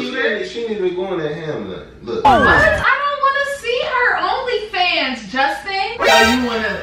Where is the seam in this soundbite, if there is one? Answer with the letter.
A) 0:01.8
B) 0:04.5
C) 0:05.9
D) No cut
C